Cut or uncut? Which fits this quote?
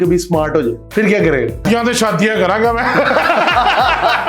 cut